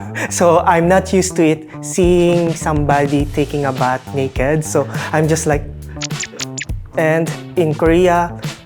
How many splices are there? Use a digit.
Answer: 1